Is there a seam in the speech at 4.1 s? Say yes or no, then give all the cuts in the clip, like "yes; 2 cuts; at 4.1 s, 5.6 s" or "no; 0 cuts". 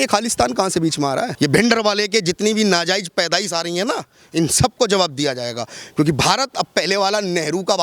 no; 1 cut; at 1.3 s